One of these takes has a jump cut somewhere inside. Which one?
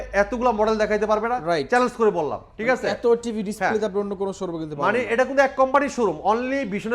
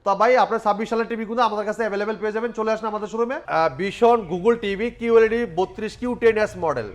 second; 1 cut; at 3.4 s

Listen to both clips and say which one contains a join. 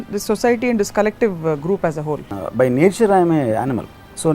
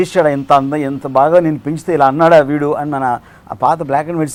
first; 1 cut; at 2.4 s

